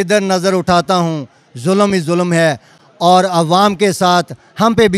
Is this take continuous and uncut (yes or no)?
yes